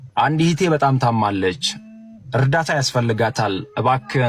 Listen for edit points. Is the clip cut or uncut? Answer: uncut